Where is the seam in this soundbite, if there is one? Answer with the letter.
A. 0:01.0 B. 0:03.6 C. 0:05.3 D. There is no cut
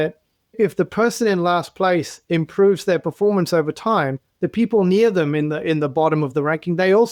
D